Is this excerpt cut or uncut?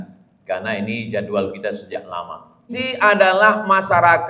cut